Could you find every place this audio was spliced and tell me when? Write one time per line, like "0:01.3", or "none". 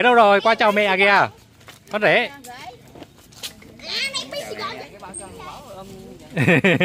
0:04.8